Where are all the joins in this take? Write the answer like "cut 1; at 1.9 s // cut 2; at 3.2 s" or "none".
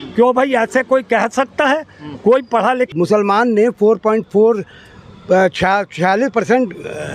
cut 1; at 2.9 s